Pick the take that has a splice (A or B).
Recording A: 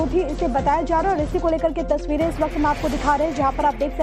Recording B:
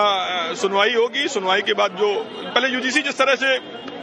B